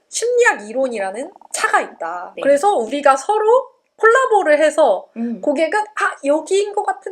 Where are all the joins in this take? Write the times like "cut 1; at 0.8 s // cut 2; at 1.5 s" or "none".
cut 1; at 2.3 s